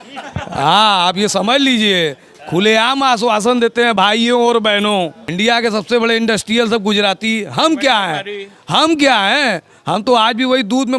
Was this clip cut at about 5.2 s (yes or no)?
yes